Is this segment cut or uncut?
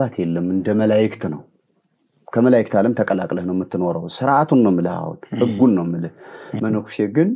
cut